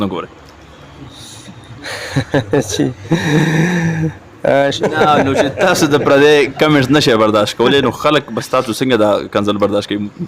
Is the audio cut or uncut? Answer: cut